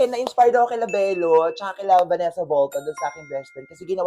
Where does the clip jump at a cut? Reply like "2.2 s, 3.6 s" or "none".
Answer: none